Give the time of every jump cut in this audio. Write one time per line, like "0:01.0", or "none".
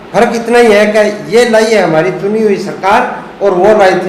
none